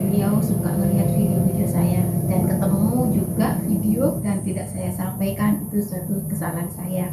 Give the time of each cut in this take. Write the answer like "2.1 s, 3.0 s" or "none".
4.2 s